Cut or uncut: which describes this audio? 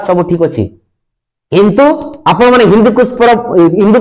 cut